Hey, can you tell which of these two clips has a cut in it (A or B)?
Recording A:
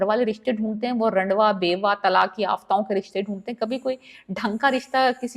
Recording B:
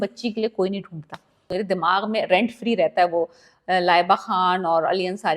B